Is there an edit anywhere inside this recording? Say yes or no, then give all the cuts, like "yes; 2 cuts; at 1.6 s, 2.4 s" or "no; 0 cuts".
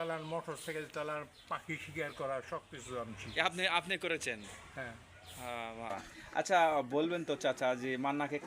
yes; 1 cut; at 5.9 s